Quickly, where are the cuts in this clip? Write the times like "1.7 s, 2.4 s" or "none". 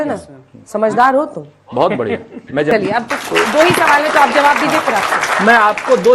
none